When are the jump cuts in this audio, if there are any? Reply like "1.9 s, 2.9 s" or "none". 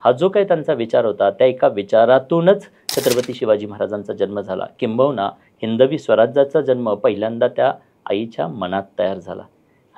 none